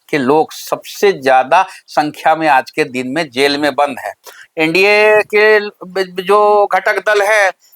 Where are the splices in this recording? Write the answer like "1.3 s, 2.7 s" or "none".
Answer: 4.4 s